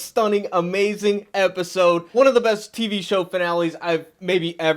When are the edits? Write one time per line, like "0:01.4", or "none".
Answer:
0:02.1